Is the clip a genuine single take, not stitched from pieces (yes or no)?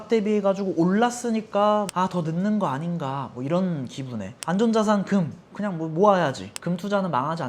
no